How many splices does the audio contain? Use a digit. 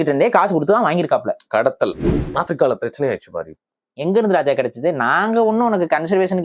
1